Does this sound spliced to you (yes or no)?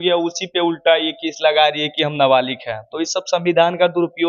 no